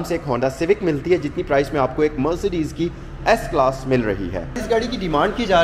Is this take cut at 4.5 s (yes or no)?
yes